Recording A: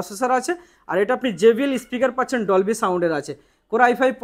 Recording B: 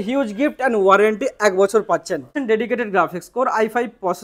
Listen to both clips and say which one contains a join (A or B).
B